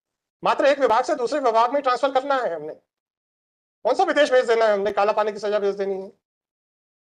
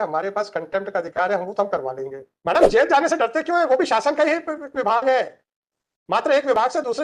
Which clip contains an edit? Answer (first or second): second